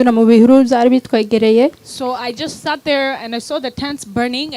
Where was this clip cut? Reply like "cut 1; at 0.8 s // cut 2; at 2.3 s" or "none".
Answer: none